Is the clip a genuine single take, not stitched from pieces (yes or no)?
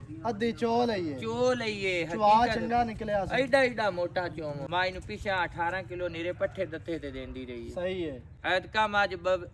no